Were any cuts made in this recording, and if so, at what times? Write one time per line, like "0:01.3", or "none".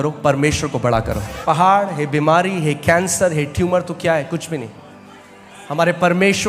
0:01.4

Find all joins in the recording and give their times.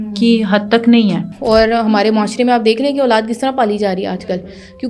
0:01.3

